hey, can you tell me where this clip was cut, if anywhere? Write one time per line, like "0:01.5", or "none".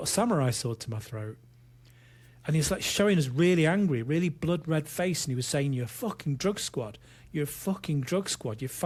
none